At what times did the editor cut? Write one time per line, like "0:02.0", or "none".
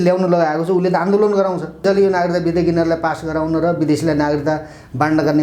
0:01.8

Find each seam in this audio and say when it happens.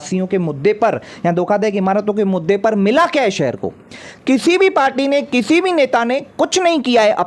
none

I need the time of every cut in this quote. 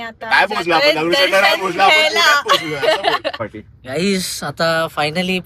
0:03.4

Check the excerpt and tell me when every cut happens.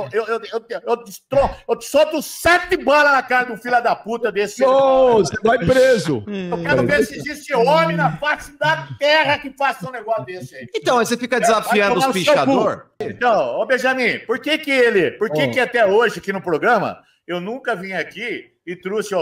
0:06.5
0:13.1

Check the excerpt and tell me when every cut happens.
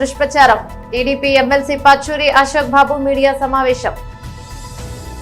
0:04.1

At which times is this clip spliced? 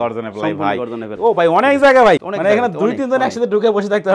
0:01.1
0:02.3

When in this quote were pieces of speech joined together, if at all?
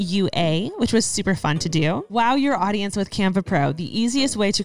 0:02.1

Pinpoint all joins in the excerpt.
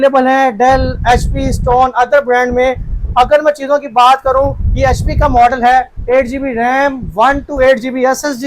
0:06.0

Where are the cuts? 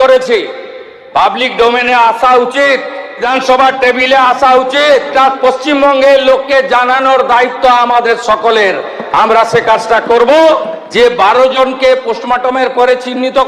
0:03.2
0:05.1
0:10.8

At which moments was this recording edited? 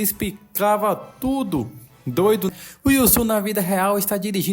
0:02.5

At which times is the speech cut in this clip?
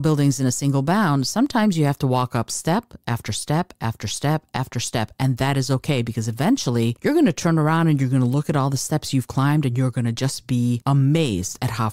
0:10.8

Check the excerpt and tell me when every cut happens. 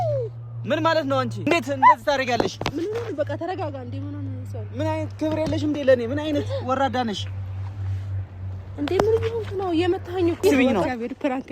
0:01.5
0:10.4

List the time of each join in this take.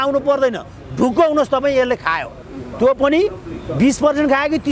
none

